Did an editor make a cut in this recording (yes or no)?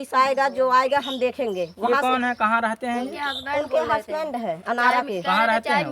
no